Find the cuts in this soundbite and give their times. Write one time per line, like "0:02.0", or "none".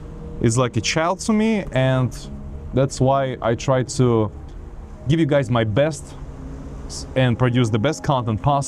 none